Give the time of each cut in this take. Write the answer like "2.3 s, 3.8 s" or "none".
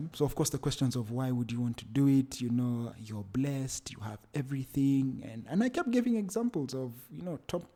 none